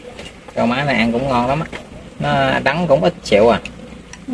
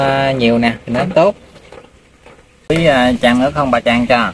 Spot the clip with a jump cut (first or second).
second